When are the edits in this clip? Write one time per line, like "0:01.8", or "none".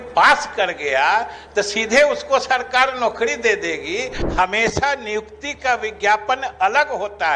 0:04.2